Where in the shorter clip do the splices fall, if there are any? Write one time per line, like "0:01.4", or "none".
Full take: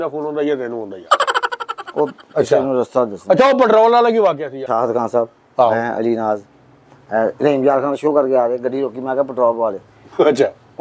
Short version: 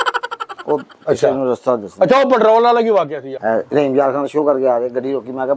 0:03.2